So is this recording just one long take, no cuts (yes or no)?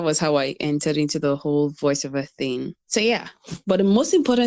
yes